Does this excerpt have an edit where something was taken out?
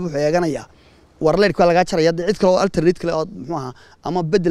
no; 0 cuts

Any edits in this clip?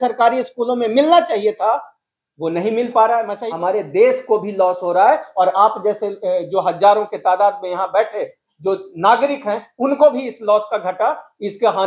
yes; 1 cut; at 3.3 s

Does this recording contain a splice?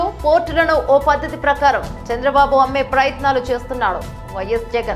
no; 0 cuts

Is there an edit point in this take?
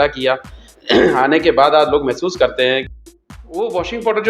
yes; 1 cut; at 2.9 s

